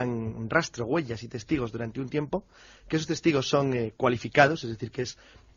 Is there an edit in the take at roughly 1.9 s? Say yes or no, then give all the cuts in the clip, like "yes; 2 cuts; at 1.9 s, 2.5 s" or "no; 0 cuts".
no; 1 cut; at 3.5 s